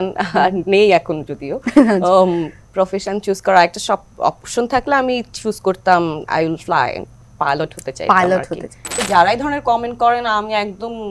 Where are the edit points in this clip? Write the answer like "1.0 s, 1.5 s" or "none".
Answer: 8.9 s